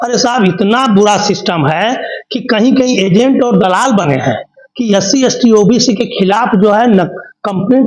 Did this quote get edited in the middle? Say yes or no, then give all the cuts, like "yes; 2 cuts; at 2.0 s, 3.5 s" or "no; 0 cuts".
no; 0 cuts